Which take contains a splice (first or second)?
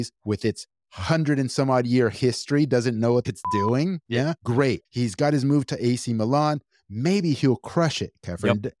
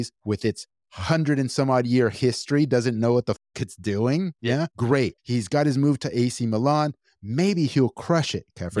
first